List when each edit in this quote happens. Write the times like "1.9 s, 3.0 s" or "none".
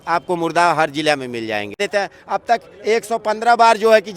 1.8 s